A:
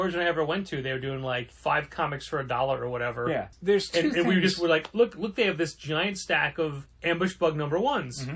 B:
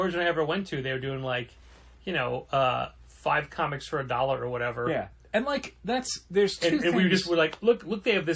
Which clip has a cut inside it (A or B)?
A